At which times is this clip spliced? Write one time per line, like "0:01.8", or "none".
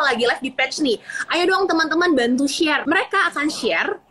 0:02.8